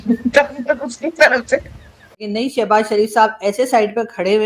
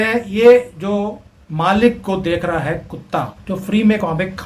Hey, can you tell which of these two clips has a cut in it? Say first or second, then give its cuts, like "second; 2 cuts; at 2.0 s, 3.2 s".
first; 1 cut; at 2.2 s